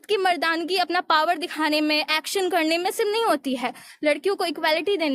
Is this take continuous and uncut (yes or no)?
yes